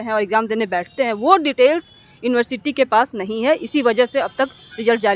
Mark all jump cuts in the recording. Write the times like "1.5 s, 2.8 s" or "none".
none